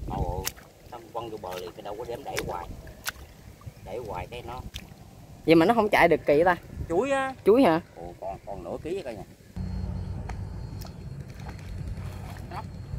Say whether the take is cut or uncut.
cut